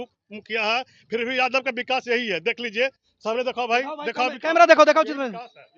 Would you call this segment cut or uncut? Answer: uncut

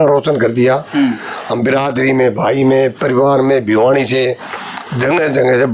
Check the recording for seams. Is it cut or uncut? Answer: uncut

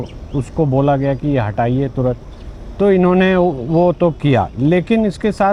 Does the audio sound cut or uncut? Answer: uncut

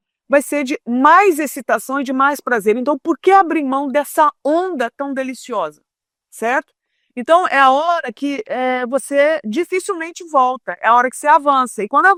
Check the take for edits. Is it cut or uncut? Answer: uncut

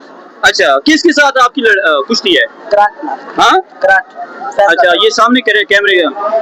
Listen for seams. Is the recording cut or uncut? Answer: uncut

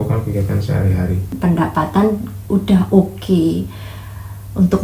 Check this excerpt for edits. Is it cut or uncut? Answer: cut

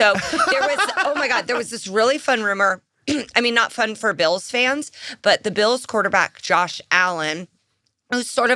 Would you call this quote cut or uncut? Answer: uncut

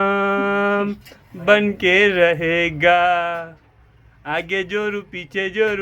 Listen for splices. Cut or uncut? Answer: uncut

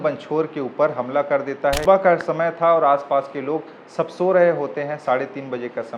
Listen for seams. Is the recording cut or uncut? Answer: cut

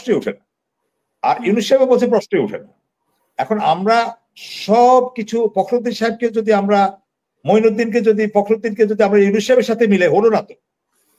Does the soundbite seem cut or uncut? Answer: uncut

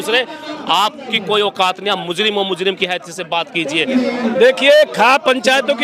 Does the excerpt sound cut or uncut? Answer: cut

